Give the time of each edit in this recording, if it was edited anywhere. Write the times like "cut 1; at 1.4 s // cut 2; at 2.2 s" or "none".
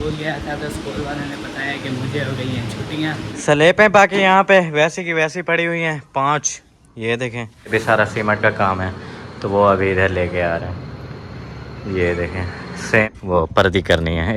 cut 1; at 3.3 s // cut 2; at 7.7 s // cut 3; at 13.0 s